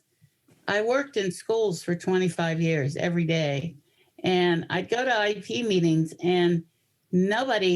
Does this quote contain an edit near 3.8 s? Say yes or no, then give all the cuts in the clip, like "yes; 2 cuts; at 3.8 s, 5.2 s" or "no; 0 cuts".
yes; 1 cut; at 3.8 s